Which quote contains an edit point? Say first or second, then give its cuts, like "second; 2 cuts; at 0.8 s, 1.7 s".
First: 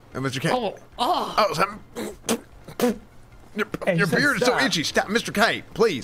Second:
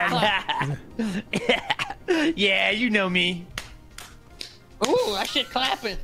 second; 1 cut; at 3.5 s